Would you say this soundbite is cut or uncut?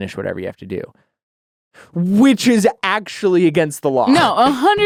uncut